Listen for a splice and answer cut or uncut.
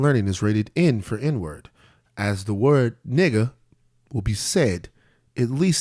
uncut